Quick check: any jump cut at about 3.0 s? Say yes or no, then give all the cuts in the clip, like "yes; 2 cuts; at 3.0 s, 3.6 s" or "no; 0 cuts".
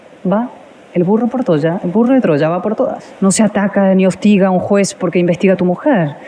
yes; 1 cut; at 3.0 s